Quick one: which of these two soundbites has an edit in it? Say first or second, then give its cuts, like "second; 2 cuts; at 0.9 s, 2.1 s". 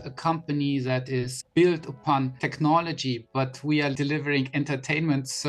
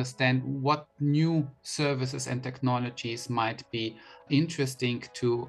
first; 3 cuts; at 1.4 s, 2.4 s, 3.9 s